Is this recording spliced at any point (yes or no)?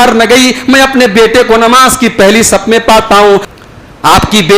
yes